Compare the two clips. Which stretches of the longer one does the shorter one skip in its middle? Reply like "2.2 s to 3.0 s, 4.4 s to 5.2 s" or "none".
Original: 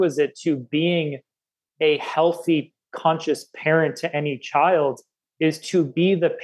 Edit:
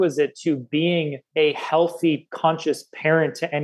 1.2 s to 1.6 s, 2.7 s to 2.9 s